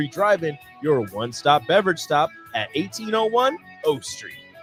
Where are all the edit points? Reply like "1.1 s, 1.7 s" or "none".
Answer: none

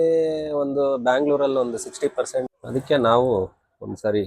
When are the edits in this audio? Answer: 2.6 s

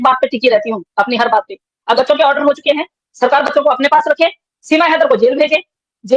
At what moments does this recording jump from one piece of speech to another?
2.0 s

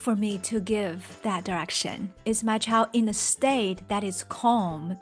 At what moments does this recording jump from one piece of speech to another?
none

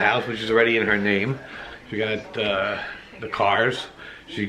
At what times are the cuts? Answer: none

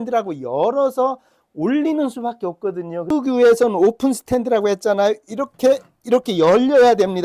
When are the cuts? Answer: 3.1 s

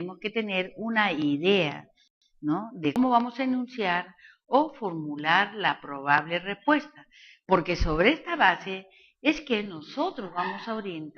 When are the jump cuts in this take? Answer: 5.5 s

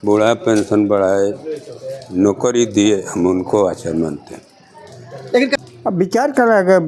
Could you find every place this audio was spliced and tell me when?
5.5 s

